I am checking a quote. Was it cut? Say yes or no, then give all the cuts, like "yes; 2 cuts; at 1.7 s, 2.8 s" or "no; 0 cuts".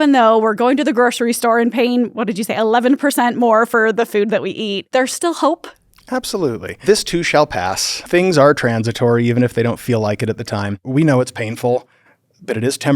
yes; 4 cuts; at 4.8 s, 6.8 s, 8.1 s, 10.8 s